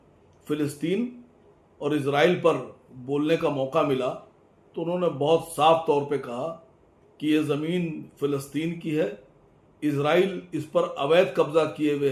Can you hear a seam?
no; 0 cuts

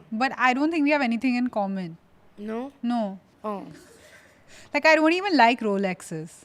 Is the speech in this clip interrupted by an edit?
yes; 1 cut; at 3.3 s

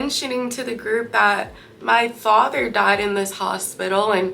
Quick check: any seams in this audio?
no; 0 cuts

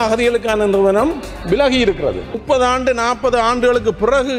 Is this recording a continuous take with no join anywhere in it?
no; 1 cut; at 2.4 s

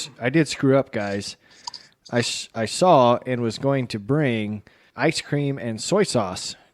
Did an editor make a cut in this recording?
yes; 1 cut; at 4.9 s

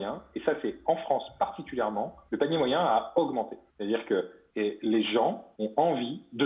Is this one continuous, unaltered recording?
no; 4 cuts; at 2.2 s, 3.6 s, 4.4 s, 5.5 s

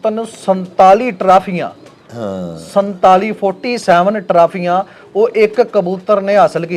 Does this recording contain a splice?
no; 0 cuts

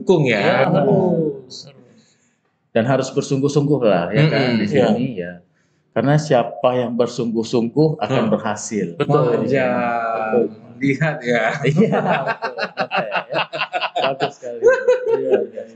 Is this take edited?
no; 0 cuts

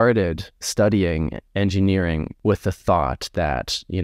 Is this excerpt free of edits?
no; 2 cuts; at 1.4 s, 2.3 s

